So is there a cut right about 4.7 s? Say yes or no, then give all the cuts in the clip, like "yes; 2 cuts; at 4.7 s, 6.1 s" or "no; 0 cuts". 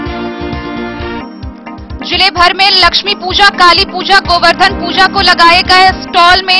no; 1 cut; at 1.2 s